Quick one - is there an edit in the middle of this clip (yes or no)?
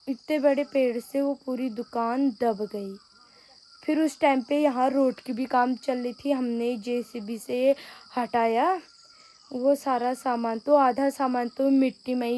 no